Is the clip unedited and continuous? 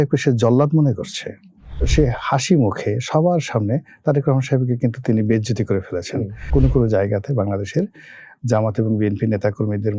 no; 2 cuts; at 1.9 s, 6.4 s

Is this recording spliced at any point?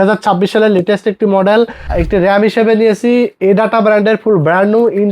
yes; 1 cut; at 1.8 s

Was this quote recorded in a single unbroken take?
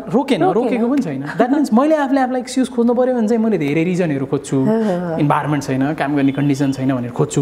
yes; 0 cuts

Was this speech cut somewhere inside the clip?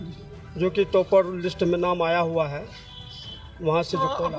no; 0 cuts

